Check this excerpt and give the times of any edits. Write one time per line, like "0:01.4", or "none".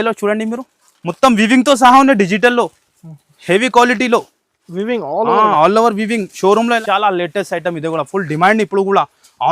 0:06.8